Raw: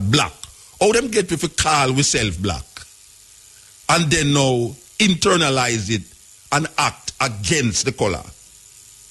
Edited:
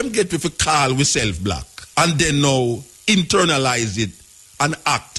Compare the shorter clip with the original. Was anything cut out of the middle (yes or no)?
yes